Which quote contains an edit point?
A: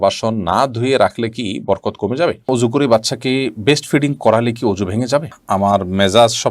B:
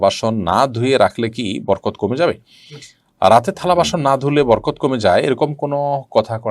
A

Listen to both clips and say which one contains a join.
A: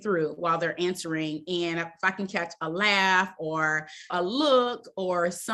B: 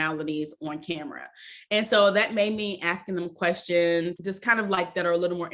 B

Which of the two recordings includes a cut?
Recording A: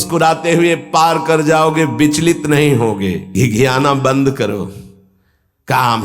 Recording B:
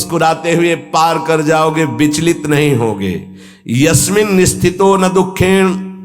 A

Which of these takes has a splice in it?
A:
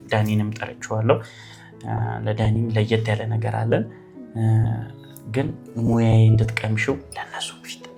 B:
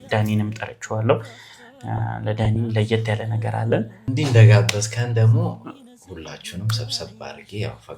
B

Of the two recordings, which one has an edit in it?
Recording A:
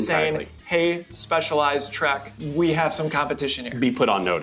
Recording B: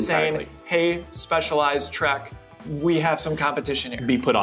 A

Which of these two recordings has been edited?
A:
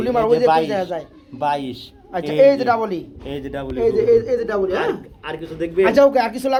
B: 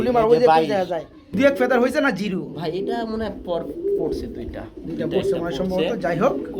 B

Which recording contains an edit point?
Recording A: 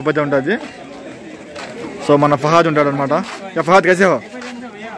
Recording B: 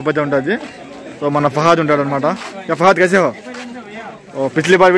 B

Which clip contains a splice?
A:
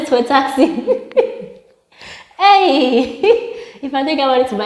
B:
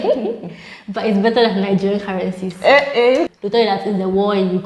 B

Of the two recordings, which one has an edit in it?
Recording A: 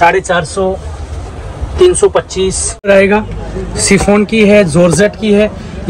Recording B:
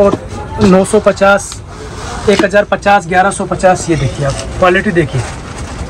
A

